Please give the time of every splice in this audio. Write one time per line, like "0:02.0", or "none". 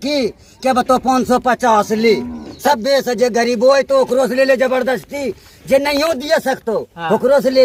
none